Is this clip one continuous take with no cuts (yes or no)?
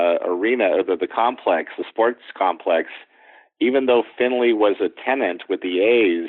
yes